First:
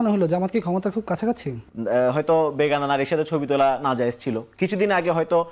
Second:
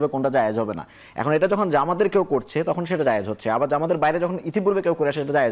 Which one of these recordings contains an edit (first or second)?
first